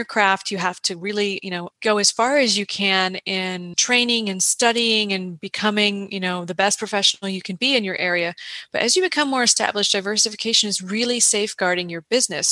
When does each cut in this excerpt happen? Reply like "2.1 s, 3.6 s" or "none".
1.7 s, 3.8 s